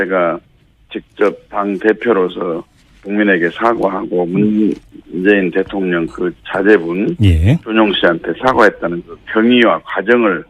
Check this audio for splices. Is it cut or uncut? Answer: uncut